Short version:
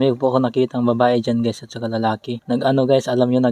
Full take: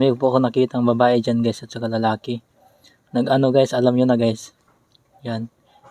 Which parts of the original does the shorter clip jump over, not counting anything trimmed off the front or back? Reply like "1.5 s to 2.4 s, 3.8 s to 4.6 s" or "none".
2.3 s to 3.0 s